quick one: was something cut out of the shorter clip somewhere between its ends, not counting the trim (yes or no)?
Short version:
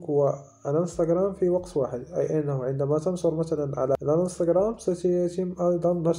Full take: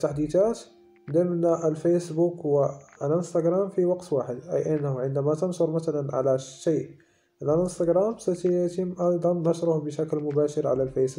yes